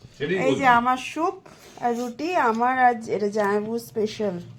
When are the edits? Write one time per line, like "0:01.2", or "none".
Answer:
none